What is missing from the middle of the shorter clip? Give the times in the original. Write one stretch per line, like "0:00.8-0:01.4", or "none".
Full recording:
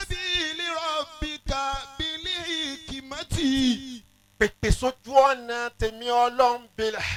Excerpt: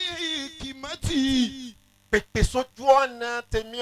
none